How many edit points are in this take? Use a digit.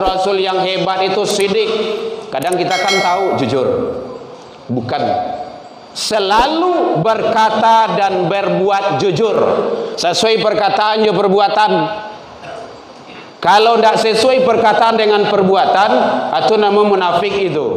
0